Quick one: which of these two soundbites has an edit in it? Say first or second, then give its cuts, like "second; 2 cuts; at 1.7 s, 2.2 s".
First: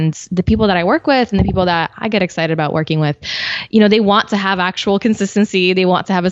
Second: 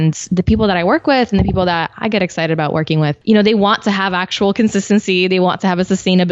second; 1 cut; at 3.2 s